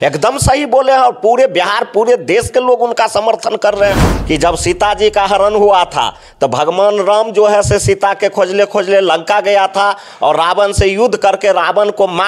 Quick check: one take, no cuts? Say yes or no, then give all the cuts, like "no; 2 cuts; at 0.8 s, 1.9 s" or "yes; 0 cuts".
no; 1 cut; at 4.1 s